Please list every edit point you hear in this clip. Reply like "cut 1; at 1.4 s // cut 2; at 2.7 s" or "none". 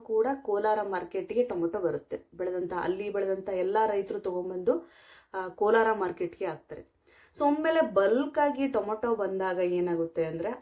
none